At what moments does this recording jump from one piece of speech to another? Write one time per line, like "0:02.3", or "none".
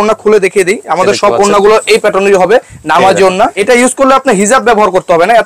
0:03.6